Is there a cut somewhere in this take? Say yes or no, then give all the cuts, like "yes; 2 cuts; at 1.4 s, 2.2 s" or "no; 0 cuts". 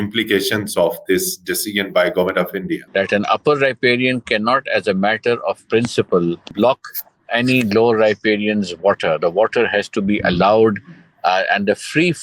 yes; 2 cuts; at 2.8 s, 6.5 s